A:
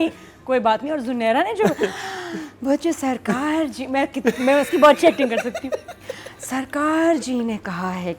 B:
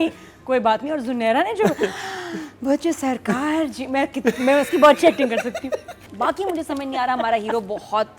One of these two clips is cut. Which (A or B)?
B